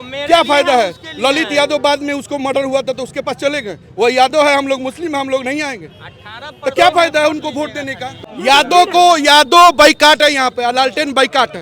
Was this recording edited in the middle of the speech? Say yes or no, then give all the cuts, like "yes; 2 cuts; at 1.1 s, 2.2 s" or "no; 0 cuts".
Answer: yes; 1 cut; at 8.2 s